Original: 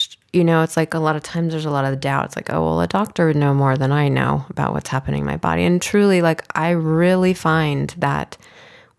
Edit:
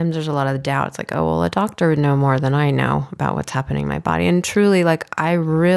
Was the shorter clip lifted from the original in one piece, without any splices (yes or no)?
yes